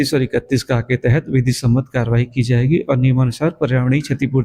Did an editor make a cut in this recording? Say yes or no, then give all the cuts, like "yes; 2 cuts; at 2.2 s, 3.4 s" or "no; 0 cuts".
yes; 1 cut; at 3.1 s